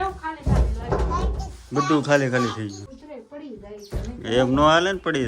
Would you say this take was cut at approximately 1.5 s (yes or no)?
no